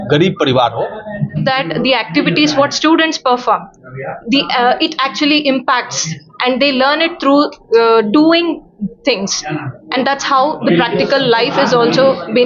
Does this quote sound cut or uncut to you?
cut